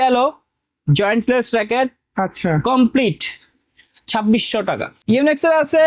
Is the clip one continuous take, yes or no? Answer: no